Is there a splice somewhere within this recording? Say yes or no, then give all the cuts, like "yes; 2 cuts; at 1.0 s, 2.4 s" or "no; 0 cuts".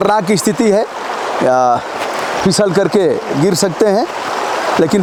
no; 0 cuts